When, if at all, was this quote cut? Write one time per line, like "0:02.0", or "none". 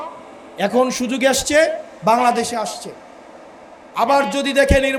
none